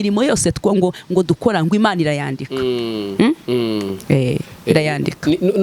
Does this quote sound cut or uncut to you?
uncut